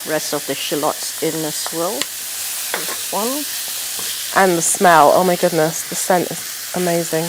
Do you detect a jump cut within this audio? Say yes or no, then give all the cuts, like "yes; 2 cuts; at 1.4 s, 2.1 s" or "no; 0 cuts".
no; 0 cuts